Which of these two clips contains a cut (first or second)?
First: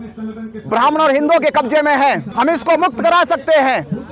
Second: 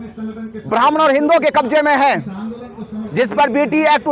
first